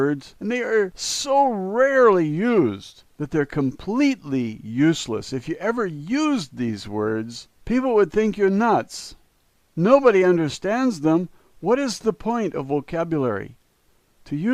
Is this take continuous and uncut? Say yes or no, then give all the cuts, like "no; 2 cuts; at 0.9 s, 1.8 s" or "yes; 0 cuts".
no; 1 cut; at 6.2 s